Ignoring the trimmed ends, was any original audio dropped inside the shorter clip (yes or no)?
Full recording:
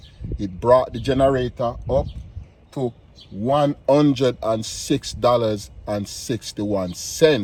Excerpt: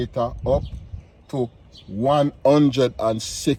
no